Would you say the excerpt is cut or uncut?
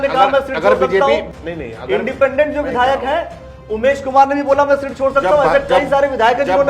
cut